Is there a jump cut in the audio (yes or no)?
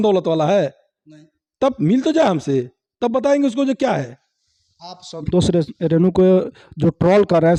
no